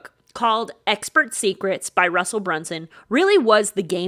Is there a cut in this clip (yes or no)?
no